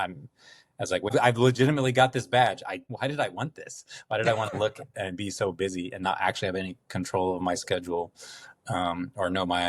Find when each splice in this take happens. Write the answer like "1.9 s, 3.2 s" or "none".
1.1 s, 2.9 s